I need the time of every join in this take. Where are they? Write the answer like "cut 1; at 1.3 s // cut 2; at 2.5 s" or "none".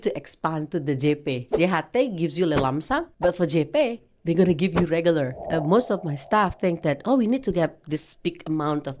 cut 1; at 1.5 s // cut 2; at 3.1 s // cut 3; at 5.4 s